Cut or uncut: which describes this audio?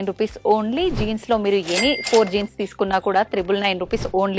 uncut